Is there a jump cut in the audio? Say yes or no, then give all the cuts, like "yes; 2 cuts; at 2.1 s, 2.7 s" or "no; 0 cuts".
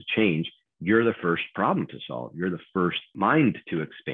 yes; 1 cut; at 3.1 s